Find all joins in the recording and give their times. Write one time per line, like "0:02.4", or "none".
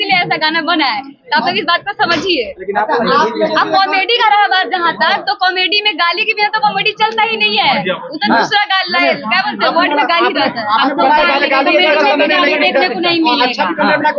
none